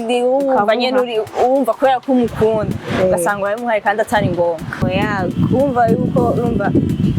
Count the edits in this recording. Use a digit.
1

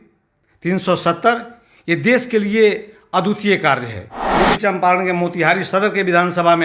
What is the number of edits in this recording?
1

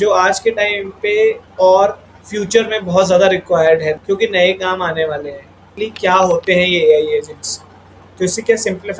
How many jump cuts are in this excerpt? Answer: 3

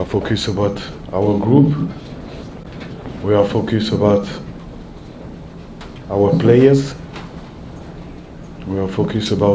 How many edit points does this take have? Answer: 0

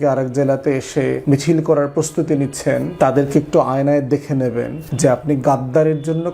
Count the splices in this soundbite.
3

